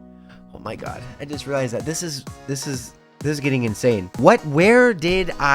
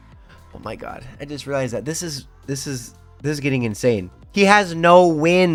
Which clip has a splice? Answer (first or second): first